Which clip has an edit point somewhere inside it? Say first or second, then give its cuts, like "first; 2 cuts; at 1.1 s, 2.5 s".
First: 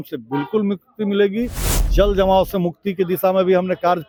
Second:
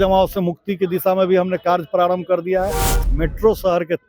second; 1 cut; at 2.9 s